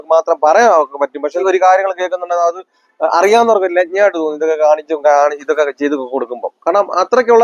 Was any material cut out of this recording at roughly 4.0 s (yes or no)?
no